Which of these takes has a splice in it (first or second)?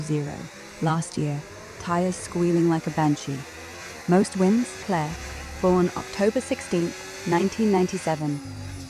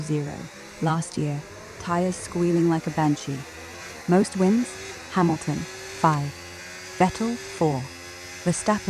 first